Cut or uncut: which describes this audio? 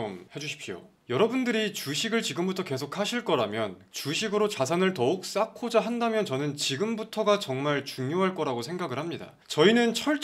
cut